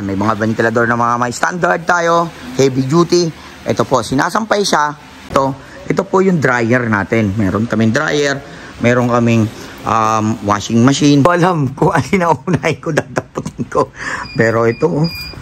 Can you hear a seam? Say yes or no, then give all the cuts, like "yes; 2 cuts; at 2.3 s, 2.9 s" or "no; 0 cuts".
yes; 2 cuts; at 5.3 s, 11.2 s